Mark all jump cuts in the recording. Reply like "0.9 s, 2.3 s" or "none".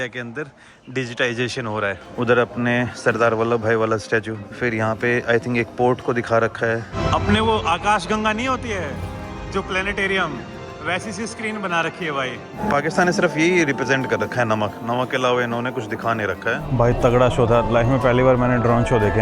2.1 s, 4.4 s, 7.0 s, 12.6 s, 16.6 s